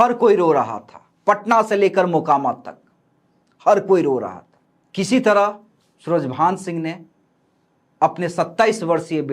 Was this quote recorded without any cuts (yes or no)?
yes